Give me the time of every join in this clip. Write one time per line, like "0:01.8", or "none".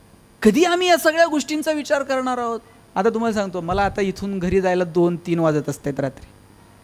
0:02.8